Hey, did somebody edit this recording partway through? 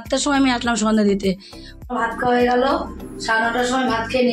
yes; 1 cut; at 1.8 s

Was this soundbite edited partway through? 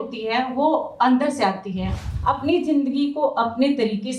yes; 1 cut; at 2.1 s

